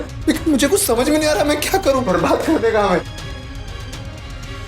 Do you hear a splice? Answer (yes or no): yes